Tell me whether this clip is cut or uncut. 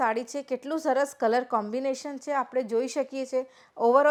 uncut